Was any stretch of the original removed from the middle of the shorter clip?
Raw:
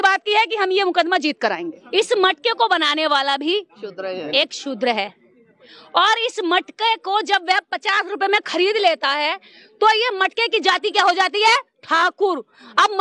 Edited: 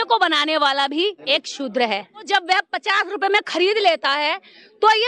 yes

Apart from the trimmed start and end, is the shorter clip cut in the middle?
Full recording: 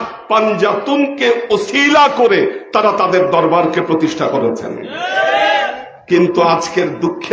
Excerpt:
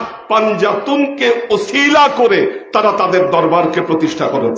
no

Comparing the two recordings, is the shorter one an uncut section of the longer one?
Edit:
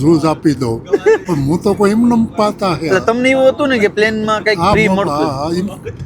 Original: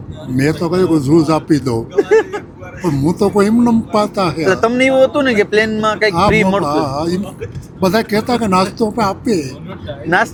no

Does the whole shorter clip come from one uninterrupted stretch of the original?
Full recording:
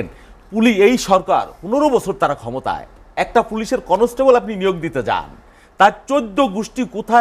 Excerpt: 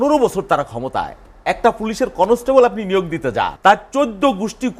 no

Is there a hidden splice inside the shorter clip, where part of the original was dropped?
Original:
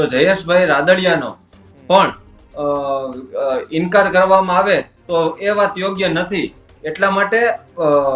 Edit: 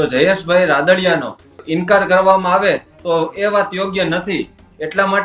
yes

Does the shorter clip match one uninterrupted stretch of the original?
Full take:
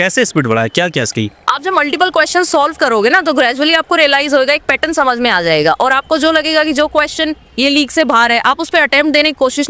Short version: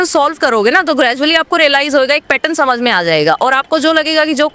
yes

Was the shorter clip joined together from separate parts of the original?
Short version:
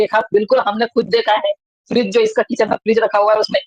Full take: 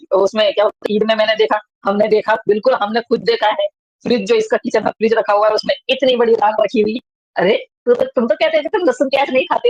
no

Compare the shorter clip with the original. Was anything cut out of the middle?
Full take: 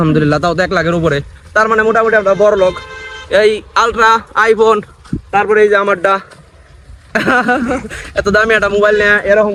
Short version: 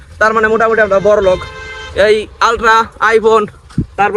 no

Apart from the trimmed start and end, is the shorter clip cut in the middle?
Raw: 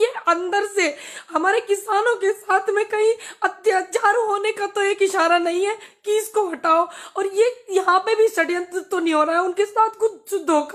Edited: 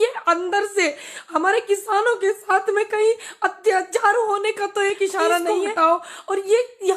yes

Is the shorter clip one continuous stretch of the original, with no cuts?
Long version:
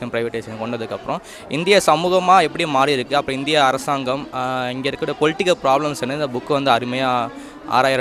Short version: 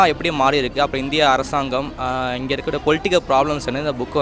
yes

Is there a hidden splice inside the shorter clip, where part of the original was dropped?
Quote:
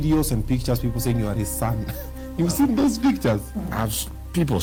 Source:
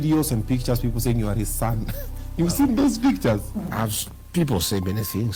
no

